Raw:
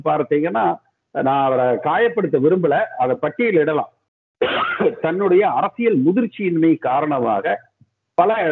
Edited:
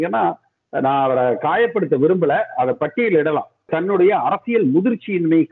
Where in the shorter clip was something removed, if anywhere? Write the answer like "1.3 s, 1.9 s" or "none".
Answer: 3.7 s